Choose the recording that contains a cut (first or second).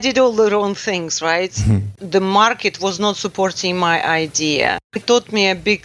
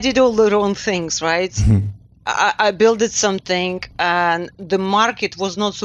first